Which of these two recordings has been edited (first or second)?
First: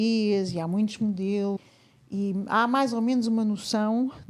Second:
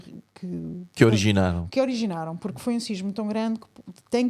first